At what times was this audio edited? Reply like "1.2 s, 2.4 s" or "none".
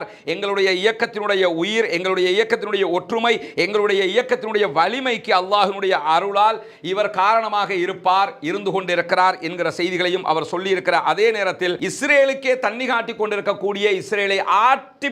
11.8 s